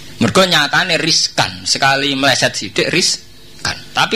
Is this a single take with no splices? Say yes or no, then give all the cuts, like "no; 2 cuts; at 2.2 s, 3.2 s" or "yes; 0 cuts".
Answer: yes; 0 cuts